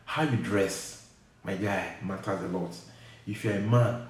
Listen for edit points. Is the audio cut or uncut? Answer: uncut